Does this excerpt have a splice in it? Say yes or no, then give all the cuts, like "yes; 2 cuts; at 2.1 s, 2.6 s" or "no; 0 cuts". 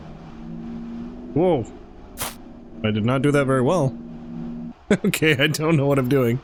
no; 0 cuts